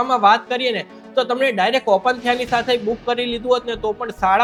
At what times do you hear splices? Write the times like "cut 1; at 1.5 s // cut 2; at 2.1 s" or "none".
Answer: none